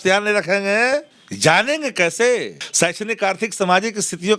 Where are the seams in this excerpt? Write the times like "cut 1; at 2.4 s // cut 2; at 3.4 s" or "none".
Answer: cut 1; at 1.2 s // cut 2; at 2.6 s